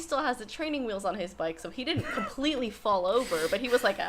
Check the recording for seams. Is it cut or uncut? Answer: uncut